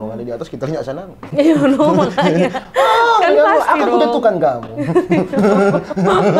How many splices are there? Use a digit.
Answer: 0